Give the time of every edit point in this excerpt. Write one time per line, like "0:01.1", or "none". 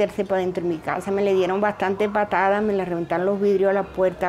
none